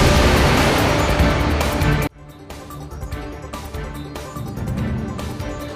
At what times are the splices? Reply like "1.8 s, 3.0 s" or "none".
3.3 s